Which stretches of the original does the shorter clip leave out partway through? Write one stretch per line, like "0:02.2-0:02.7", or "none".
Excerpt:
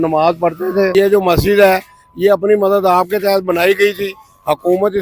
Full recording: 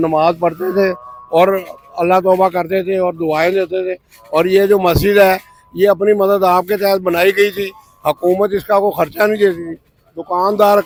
0:00.9-0:04.5